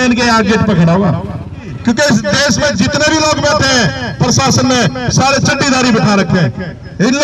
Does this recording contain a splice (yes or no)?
yes